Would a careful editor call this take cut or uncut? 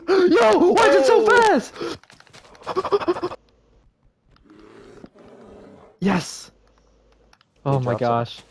cut